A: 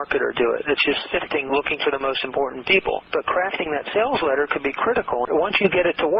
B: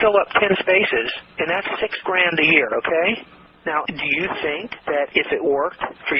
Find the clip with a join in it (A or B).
B